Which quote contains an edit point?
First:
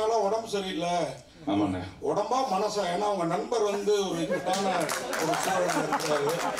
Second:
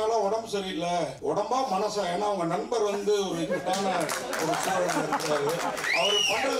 second; 1 cut; at 1.1 s

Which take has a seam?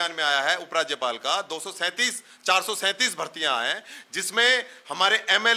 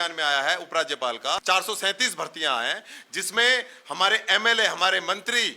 second; 1 cut; at 1.4 s

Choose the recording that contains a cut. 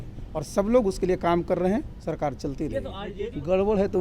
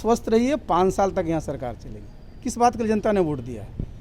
first; 1 cut; at 3.0 s

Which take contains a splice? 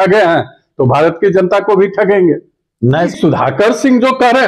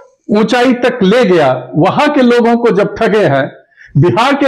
first; 1 cut; at 3.1 s

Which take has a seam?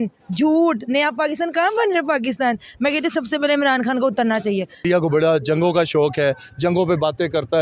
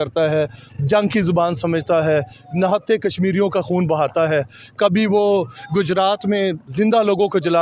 first; 1 cut; at 4.7 s

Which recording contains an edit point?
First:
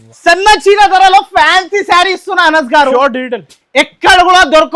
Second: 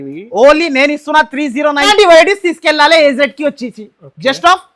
second; 1 cut; at 1.9 s

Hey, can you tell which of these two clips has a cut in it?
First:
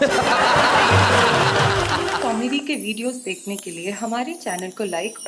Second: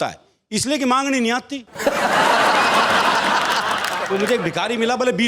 first; 1 cut; at 2.2 s

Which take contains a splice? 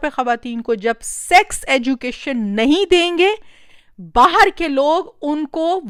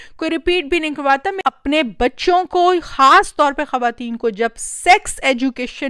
second; 1 cut; at 1.3 s

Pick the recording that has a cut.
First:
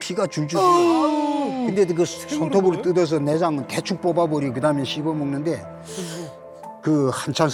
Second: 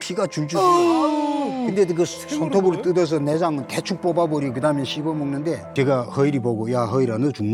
second; 1 cut; at 5.6 s

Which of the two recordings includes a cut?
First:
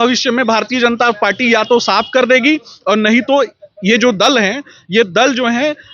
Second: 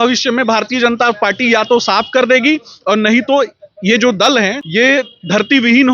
second; 1 cut; at 4.8 s

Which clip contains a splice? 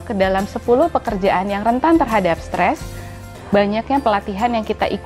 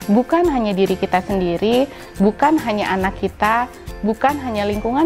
first; 1 cut; at 3.2 s

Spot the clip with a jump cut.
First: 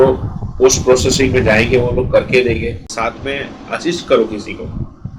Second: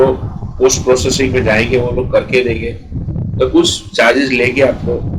first; 1 cut; at 2.9 s

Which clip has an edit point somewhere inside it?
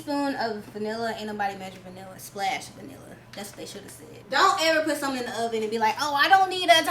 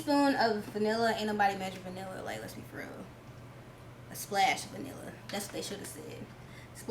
first; 2 cuts; at 2.1 s, 4.2 s

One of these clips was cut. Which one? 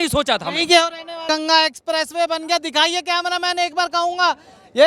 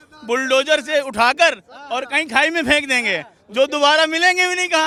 first; 1 cut; at 1.3 s

